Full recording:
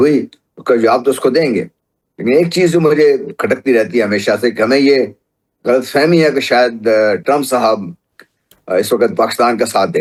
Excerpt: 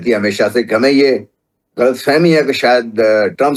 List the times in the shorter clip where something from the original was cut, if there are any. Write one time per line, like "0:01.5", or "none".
none